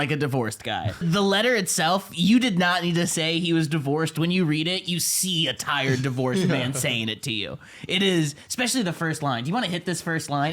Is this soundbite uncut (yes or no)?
no